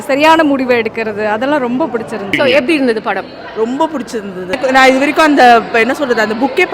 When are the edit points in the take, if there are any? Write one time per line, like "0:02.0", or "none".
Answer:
0:02.2
0:04.6